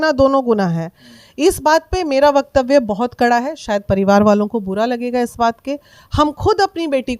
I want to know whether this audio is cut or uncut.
uncut